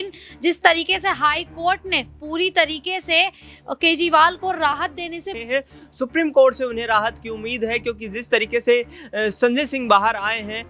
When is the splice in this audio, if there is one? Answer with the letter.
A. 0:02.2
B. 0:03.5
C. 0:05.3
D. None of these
C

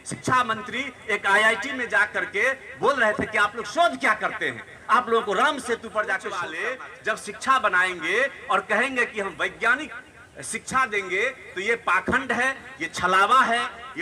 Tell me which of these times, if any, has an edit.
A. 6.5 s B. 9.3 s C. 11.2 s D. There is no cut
A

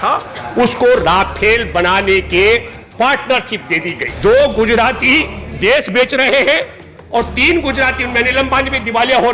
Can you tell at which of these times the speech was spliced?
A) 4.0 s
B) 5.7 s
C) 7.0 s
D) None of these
A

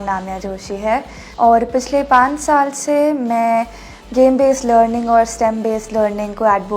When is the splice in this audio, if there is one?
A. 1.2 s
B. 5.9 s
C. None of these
A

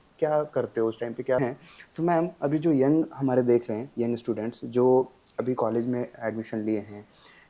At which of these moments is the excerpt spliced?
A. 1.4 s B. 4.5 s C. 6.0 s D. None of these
A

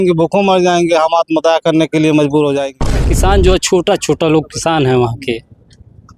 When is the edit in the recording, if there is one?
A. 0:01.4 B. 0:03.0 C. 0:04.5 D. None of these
B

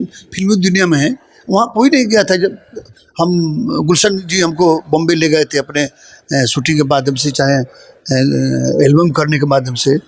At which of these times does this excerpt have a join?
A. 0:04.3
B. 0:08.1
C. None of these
C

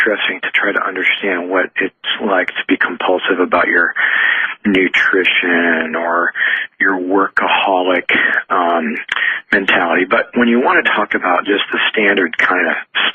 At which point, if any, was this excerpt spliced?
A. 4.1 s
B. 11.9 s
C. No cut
B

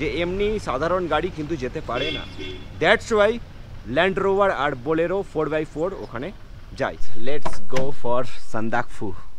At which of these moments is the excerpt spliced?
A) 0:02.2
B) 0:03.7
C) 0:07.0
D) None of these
D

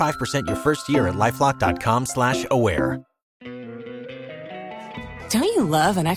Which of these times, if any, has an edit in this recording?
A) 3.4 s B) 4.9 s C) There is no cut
C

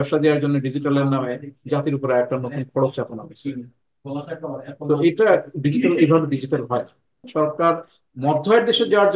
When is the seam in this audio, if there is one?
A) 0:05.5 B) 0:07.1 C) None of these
B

